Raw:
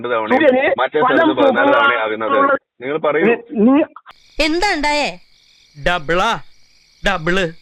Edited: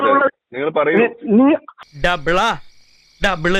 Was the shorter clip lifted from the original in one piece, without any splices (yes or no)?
no